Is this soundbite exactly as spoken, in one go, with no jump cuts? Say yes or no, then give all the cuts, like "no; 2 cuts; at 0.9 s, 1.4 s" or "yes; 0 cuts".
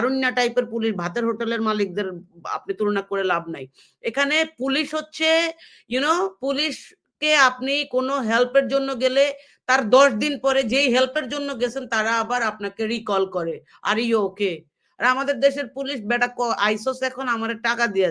yes; 0 cuts